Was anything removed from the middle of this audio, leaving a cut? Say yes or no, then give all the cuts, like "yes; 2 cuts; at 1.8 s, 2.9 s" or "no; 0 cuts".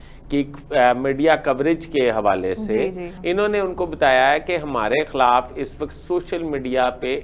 yes; 1 cut; at 3.1 s